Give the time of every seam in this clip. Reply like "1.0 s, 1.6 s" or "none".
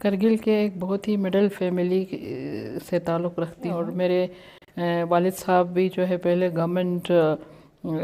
3.8 s